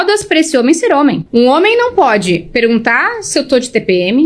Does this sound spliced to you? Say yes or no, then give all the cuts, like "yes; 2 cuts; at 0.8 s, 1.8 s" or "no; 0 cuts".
yes; 1 cut; at 1.2 s